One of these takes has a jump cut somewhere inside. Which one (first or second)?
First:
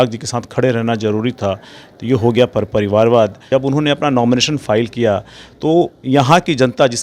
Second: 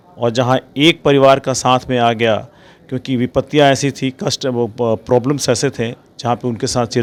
first